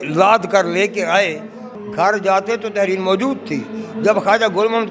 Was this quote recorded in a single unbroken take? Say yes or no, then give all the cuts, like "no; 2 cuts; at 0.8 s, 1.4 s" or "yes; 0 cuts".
no; 1 cut; at 1.6 s